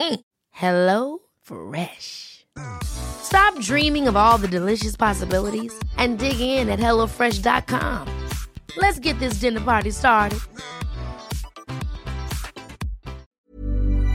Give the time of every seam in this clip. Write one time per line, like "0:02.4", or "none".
0:13.2